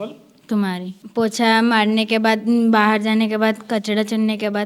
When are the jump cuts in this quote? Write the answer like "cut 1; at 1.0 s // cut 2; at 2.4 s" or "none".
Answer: cut 1; at 1.0 s